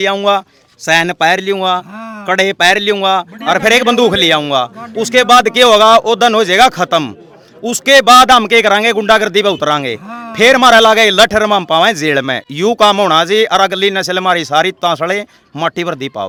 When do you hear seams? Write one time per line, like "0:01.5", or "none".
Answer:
none